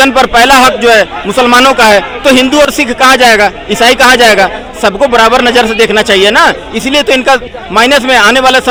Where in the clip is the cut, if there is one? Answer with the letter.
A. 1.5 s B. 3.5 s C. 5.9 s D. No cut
D